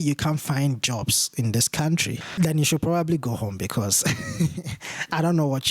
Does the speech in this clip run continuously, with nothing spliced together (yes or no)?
no